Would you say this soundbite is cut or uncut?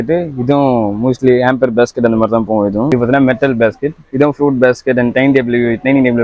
cut